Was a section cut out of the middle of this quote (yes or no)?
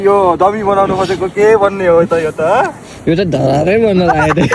no